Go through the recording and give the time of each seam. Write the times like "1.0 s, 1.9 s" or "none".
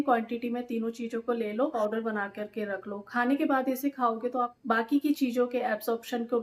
1.7 s, 4.5 s

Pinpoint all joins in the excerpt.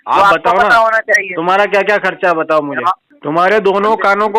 3.1 s

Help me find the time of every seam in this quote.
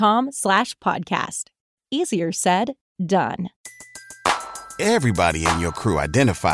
3.6 s

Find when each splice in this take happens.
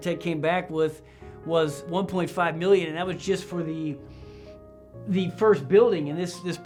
none

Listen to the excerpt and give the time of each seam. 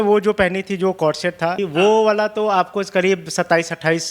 1.6 s

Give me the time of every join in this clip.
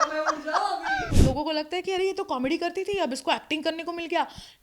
1.1 s

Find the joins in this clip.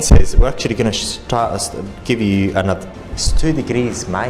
2.9 s

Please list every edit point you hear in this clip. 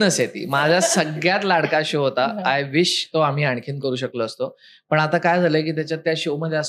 none

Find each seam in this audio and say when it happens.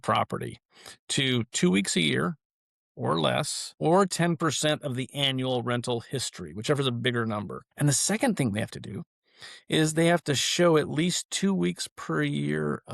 7.6 s

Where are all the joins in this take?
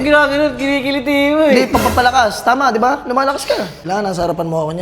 3.8 s

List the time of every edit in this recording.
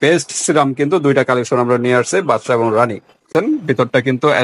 3.3 s

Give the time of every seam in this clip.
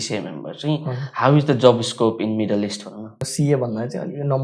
3.2 s

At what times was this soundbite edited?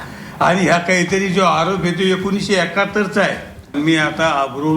3.6 s

